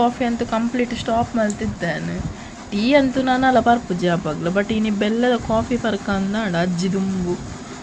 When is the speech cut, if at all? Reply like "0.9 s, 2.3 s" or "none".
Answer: none